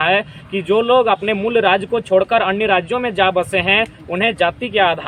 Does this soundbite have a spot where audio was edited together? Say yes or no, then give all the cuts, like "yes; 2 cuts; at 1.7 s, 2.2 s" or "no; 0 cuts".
no; 0 cuts